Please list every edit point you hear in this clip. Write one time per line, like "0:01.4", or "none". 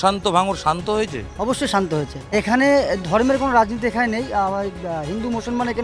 0:02.3